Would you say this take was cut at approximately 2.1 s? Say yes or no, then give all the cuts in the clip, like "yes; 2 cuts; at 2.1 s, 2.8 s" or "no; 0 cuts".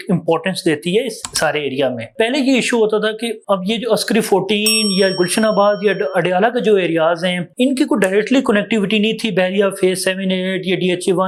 no; 0 cuts